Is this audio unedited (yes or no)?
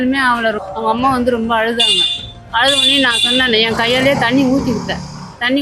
yes